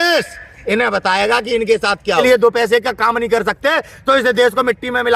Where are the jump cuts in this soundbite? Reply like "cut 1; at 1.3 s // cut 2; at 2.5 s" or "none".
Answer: cut 1; at 2.2 s